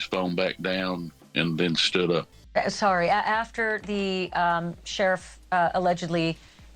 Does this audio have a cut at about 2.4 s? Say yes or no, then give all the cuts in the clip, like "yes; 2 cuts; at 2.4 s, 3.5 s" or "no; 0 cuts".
yes; 2 cuts; at 1.2 s, 2.4 s